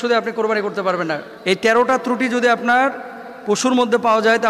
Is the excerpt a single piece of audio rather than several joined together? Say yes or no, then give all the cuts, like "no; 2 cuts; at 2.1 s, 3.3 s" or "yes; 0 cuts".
no; 1 cut; at 1.3 s